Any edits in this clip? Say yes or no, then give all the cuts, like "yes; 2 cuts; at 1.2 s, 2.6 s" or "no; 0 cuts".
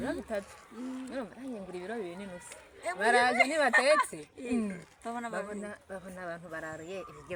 no; 0 cuts